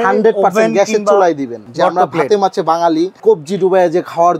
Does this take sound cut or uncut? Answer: cut